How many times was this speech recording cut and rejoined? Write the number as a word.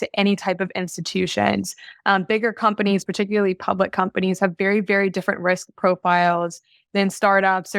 zero